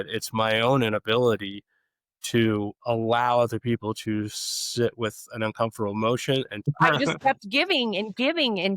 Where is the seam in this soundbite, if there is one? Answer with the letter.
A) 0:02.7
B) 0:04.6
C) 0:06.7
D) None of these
C